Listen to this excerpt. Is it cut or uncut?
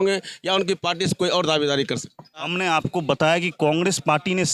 cut